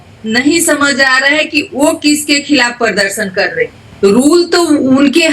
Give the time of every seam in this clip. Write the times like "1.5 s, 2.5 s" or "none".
3.8 s